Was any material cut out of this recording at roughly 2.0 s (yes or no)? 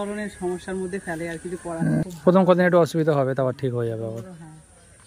yes